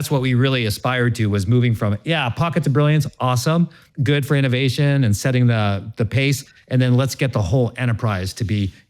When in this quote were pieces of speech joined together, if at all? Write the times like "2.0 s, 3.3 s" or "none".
3.9 s